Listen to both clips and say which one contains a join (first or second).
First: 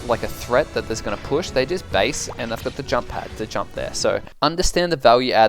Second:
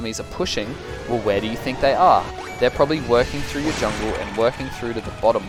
first